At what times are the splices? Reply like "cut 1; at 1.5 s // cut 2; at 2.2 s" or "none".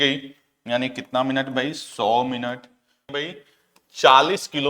cut 1; at 3.1 s